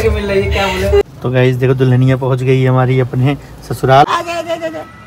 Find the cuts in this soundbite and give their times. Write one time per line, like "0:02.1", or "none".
0:01.0
0:04.1